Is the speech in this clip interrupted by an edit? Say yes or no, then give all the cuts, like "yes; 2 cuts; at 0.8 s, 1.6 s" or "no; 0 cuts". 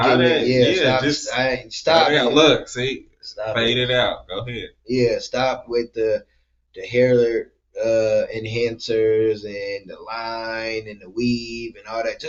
no; 0 cuts